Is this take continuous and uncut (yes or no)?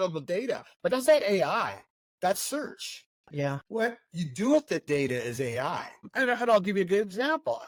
yes